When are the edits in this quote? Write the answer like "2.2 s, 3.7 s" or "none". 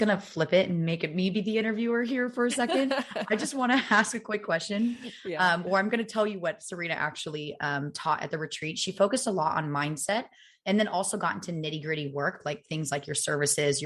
none